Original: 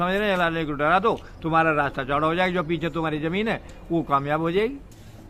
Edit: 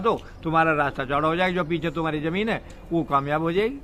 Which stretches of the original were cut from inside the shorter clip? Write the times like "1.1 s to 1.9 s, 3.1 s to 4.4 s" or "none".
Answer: none